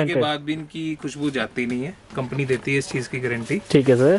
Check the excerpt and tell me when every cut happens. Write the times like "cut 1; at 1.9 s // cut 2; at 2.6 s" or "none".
none